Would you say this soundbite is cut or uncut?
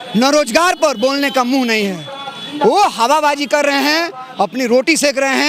uncut